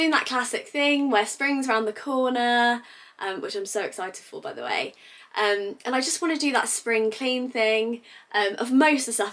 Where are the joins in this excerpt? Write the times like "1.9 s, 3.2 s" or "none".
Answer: none